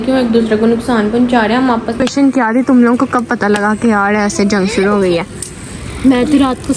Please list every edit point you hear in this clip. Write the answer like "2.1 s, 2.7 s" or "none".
2.0 s